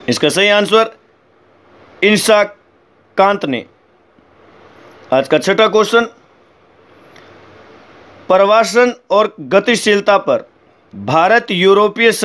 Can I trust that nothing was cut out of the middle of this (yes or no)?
yes